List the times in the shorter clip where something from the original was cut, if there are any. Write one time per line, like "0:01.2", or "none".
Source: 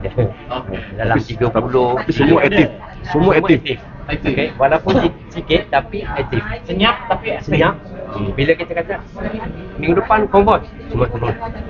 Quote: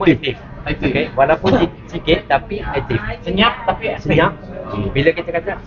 none